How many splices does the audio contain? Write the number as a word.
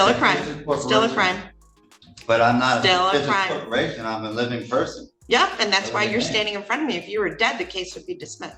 zero